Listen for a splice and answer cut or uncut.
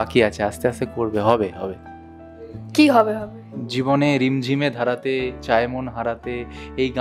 uncut